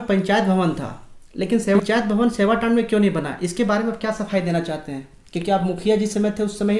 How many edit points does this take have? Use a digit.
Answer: 1